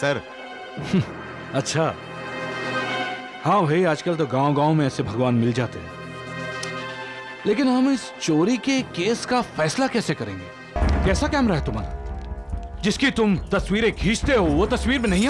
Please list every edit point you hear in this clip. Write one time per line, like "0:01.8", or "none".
0:10.8